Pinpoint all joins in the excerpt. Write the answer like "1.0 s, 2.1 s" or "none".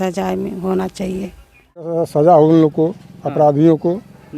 2.0 s